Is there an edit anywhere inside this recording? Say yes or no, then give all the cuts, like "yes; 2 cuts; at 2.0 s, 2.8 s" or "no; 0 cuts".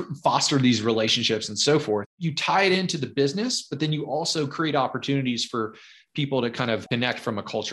yes; 2 cuts; at 2.1 s, 6.8 s